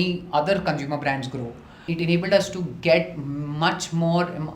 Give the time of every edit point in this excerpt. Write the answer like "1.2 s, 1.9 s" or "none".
1.8 s